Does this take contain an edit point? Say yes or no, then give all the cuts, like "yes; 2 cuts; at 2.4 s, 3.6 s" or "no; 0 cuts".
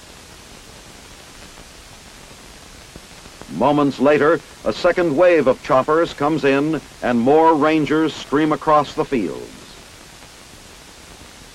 yes; 1 cut; at 5.6 s